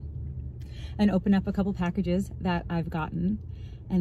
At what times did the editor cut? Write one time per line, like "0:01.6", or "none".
none